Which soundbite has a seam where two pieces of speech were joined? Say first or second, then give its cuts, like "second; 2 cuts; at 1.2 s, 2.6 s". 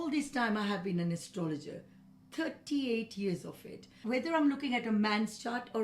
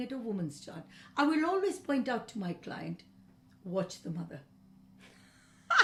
first; 1 cut; at 4.0 s